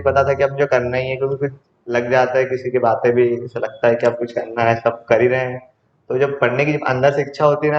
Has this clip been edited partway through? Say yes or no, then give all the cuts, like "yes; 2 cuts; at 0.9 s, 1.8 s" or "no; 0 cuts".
no; 0 cuts